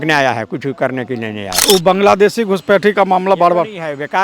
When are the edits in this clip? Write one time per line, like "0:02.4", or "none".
0:01.5